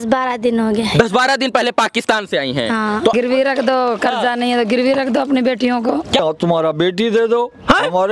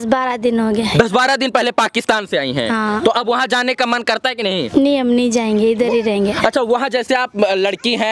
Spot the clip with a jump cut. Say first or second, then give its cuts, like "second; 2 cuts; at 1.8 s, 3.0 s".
first; 2 cuts; at 3.1 s, 6.2 s